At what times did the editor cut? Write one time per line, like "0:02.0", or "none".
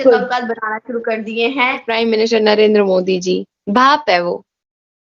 0:01.9